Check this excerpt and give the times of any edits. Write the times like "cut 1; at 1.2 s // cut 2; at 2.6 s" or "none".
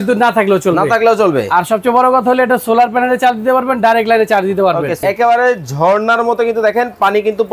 cut 1; at 5.0 s

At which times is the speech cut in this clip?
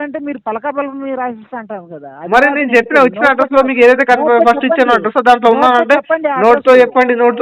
none

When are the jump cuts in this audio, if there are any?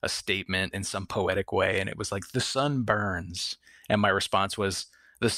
none

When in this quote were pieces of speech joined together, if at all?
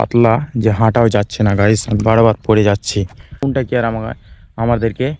cut 1; at 3.2 s

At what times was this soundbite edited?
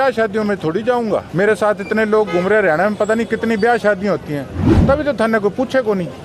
cut 1; at 1.3 s

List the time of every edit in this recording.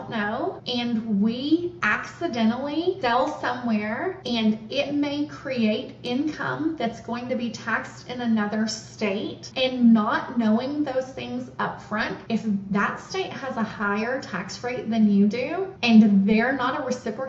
none

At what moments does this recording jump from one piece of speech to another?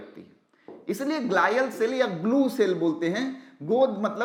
none

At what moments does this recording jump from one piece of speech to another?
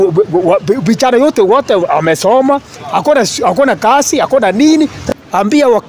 cut 1; at 5.0 s

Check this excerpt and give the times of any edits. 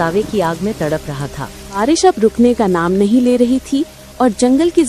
cut 1; at 1.8 s

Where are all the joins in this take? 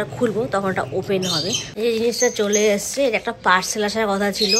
cut 1; at 1.6 s

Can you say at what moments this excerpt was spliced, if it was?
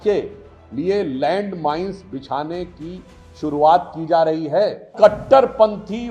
cut 1; at 4.9 s

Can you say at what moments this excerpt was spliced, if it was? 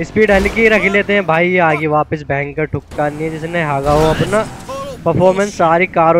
cut 1; at 2.9 s

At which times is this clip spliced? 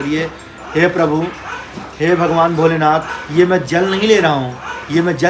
none

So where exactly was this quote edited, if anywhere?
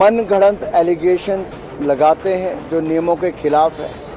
none

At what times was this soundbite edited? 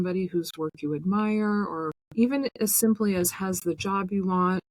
cut 1; at 2.0 s

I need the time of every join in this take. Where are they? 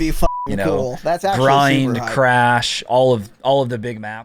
none

